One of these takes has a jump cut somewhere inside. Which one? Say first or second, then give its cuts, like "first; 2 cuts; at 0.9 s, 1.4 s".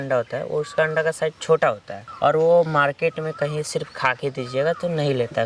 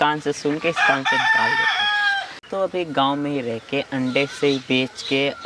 second; 1 cut; at 2.4 s